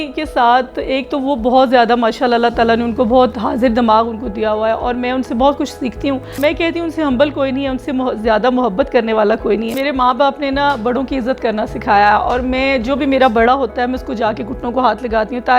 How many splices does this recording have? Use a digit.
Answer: 2